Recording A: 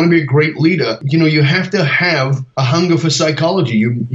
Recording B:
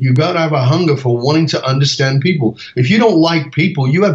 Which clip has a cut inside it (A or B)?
A